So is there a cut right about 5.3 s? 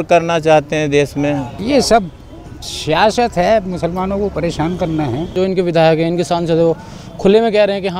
yes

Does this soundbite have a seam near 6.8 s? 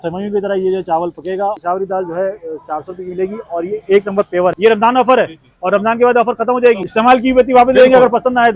yes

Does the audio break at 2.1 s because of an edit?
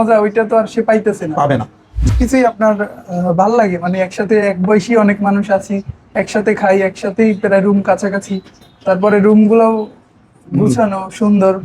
yes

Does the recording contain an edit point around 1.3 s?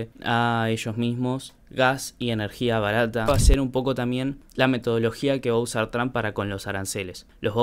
no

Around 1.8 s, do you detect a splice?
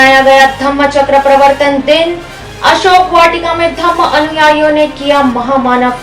no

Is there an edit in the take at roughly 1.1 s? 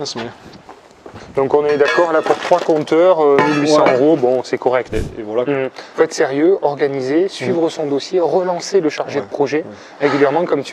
yes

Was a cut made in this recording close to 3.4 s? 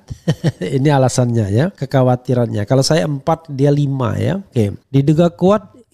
no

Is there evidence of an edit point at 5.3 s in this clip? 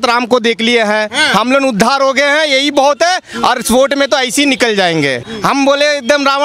yes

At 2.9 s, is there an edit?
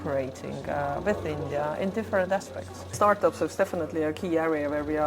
yes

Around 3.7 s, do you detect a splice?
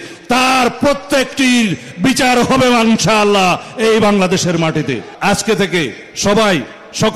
no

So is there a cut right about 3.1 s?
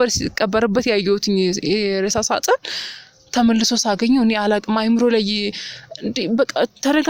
no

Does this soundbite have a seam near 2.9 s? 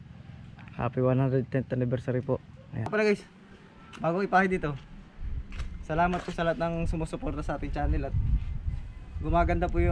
yes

